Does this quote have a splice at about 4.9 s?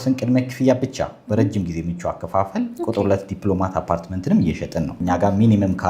yes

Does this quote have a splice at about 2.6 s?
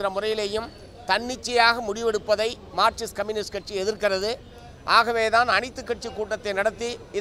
no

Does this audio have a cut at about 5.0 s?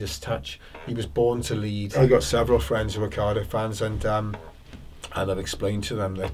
no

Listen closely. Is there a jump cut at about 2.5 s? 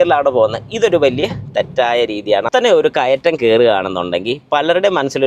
yes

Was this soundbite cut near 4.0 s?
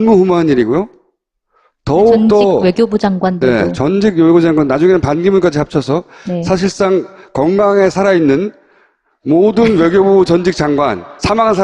yes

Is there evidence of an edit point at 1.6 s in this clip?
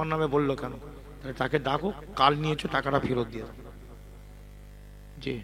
no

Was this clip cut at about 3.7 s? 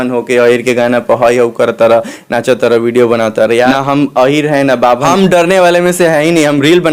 yes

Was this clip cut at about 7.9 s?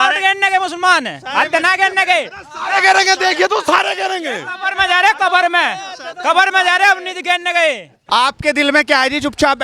yes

